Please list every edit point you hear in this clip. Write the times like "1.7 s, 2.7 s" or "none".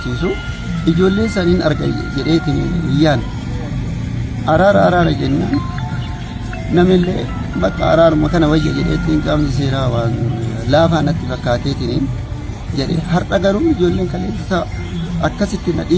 none

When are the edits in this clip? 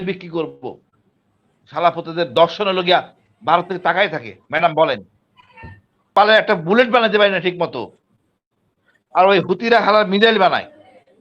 6.1 s

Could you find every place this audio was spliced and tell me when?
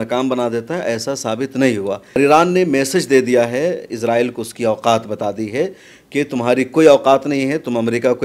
2.2 s

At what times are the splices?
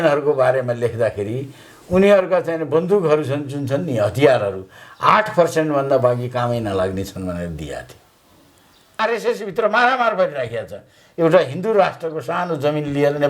9.0 s

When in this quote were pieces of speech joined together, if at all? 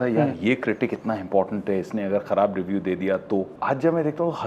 3.5 s

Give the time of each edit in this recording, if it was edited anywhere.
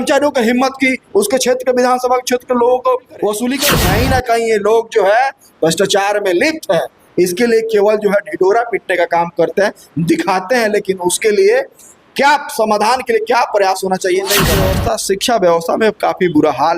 3.7 s, 14.7 s

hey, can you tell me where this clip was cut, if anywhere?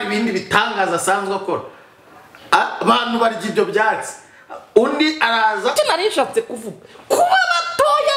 5.7 s

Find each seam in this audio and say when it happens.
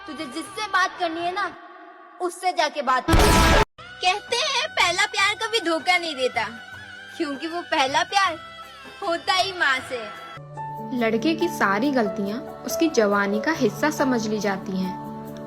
3.9 s, 10.5 s

